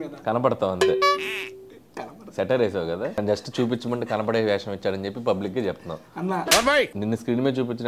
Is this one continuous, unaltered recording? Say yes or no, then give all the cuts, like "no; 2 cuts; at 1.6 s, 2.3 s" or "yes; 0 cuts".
no; 2 cuts; at 3.2 s, 6.9 s